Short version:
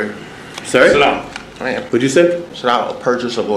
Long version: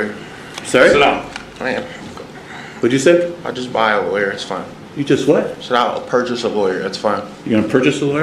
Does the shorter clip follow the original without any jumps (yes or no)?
no